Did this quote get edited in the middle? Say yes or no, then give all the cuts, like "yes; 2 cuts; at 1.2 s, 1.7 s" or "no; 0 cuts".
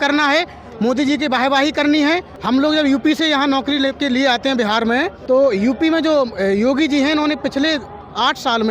yes; 2 cuts; at 2.3 s, 5.2 s